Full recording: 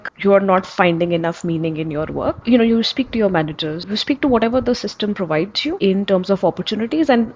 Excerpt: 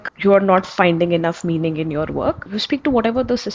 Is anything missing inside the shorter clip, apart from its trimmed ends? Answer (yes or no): yes